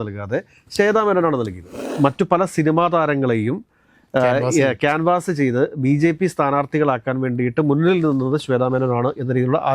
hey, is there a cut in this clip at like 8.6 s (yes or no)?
no